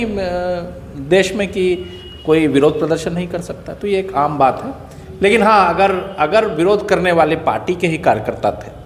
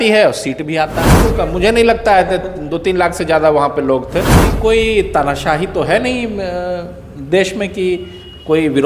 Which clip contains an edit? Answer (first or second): second